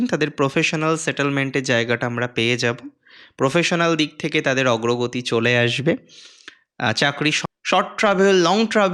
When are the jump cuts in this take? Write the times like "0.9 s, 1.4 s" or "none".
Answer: 7.4 s